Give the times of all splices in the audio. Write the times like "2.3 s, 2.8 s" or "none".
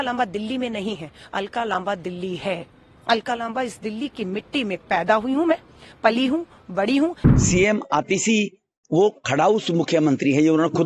7.2 s